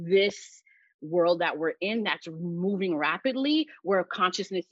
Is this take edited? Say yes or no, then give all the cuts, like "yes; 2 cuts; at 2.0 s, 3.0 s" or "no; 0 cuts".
no; 0 cuts